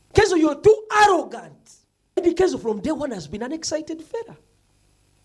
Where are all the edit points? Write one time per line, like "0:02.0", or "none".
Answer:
0:02.2